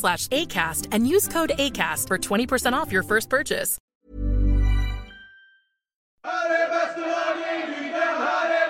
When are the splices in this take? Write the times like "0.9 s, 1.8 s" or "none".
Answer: 6.1 s